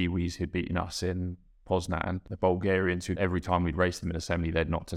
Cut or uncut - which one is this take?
cut